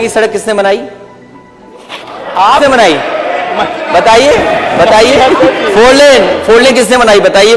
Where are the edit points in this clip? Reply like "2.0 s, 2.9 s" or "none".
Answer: none